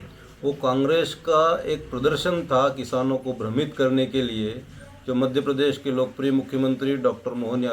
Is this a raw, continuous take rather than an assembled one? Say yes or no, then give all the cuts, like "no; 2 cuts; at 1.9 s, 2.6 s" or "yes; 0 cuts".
yes; 0 cuts